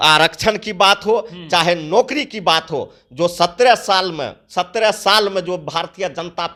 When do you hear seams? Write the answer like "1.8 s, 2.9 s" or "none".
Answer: none